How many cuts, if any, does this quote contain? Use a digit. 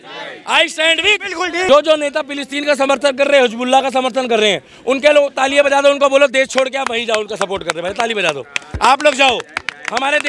1